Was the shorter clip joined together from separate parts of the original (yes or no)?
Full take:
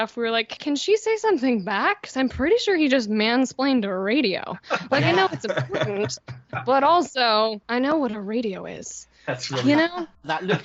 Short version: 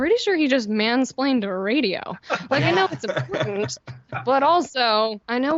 no